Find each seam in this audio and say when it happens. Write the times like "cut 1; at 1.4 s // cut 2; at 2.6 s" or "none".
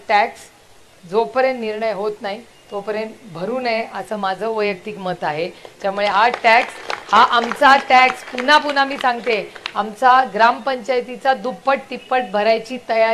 none